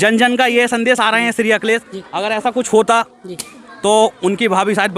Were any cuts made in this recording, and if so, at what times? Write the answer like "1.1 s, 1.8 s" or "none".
none